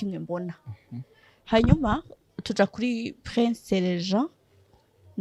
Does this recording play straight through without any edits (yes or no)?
yes